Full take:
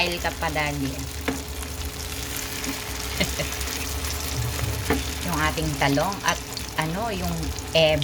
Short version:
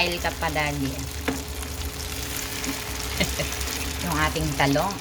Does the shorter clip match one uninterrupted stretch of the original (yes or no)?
no